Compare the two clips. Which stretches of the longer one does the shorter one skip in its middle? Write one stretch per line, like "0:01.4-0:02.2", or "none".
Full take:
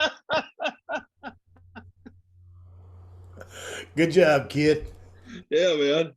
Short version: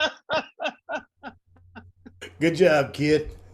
0:02.3-0:03.8